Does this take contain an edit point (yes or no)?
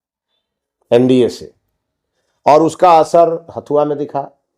no